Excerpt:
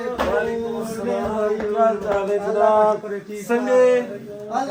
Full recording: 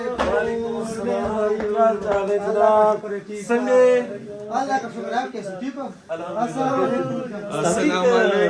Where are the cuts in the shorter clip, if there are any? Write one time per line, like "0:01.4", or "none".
none